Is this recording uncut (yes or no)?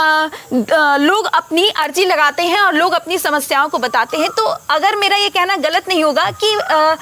yes